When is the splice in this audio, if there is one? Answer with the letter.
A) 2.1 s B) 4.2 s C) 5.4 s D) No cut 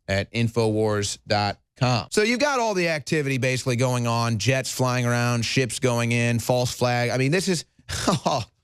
A